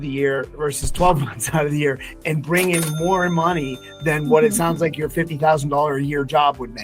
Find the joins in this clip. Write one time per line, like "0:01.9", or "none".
none